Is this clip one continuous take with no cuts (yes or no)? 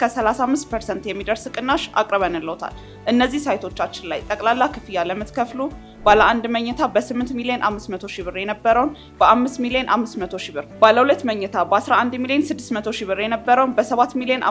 yes